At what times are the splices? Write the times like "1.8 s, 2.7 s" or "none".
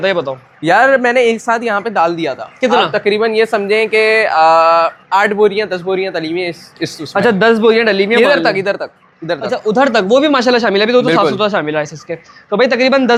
none